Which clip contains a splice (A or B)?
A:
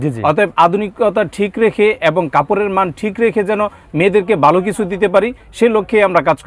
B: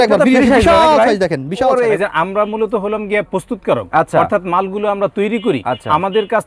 B